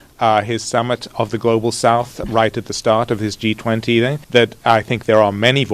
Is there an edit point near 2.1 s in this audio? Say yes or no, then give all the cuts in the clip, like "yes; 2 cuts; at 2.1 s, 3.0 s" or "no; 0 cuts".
no; 1 cut; at 4.2 s